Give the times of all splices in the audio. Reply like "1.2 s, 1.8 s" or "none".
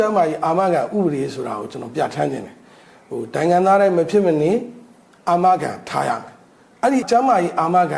7.1 s